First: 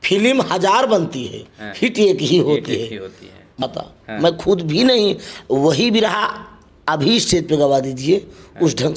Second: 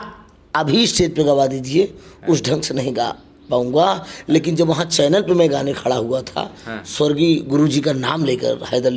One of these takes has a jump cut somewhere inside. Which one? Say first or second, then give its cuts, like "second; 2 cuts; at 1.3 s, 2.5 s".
first; 1 cut; at 3.6 s